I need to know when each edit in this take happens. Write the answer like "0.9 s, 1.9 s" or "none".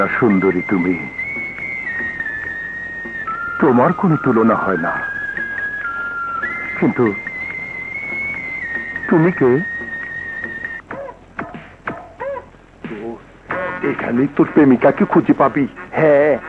10.6 s